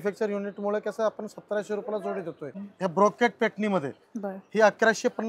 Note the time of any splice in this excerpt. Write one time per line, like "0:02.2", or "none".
0:02.6